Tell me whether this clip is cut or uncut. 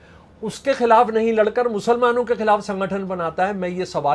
uncut